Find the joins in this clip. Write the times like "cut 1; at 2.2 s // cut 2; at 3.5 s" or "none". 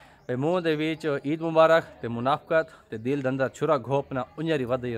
none